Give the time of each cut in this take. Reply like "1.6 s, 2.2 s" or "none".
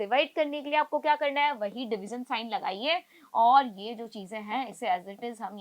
none